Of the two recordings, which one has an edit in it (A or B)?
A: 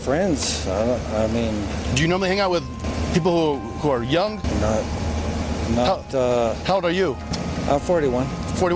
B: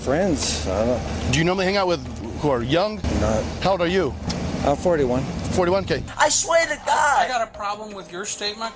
B